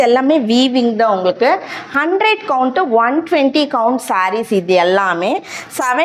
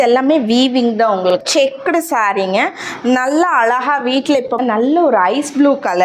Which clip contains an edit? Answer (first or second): second